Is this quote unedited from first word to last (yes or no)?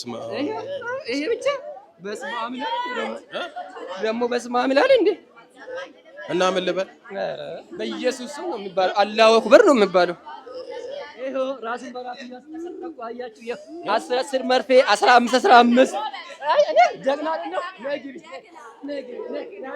no